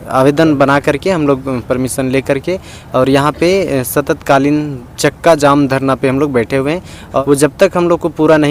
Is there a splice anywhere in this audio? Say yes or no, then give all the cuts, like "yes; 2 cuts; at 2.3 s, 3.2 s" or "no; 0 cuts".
yes; 1 cut; at 7.2 s